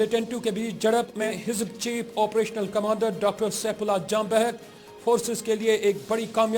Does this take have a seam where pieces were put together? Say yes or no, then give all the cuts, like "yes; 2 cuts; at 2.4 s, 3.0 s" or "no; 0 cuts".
yes; 1 cut; at 1.3 s